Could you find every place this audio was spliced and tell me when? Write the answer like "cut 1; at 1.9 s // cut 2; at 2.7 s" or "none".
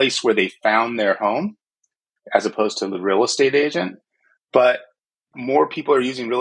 cut 1; at 5.3 s